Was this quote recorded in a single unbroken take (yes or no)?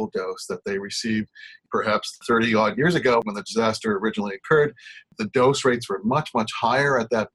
no